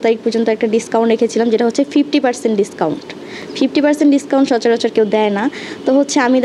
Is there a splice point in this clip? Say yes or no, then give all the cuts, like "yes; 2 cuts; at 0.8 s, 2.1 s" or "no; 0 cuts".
no; 0 cuts